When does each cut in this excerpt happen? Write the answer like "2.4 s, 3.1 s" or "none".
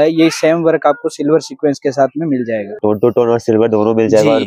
2.7 s